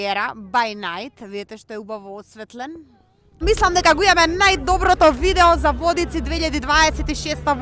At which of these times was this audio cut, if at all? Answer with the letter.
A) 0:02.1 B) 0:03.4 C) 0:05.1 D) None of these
B